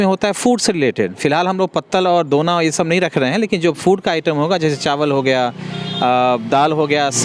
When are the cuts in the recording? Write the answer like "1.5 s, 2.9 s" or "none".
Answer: none